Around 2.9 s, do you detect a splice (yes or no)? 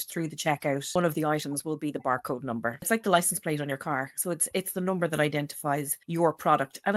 yes